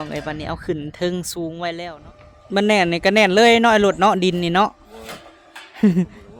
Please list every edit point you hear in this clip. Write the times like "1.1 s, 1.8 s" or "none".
1.9 s